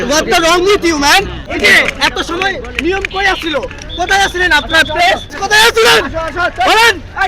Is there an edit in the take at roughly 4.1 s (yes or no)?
no